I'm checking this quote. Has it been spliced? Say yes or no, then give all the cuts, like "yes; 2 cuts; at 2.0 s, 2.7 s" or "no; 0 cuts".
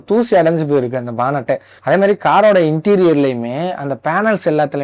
no; 0 cuts